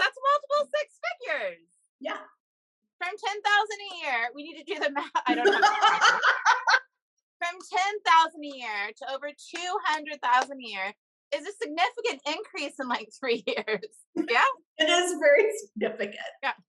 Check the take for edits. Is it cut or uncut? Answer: uncut